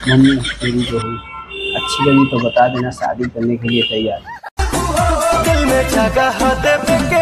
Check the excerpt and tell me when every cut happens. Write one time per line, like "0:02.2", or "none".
none